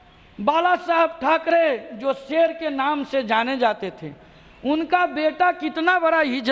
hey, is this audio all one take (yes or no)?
yes